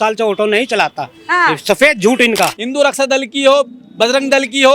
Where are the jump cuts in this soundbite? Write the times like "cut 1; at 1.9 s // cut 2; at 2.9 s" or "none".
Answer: cut 1; at 2.6 s